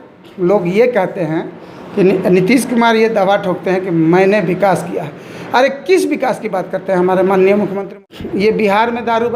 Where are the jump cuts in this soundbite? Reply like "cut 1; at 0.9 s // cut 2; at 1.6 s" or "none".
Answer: cut 1; at 7.7 s